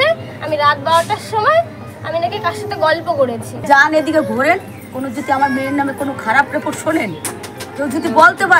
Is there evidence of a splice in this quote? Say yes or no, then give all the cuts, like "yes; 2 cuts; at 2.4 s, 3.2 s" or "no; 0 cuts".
yes; 1 cut; at 3.5 s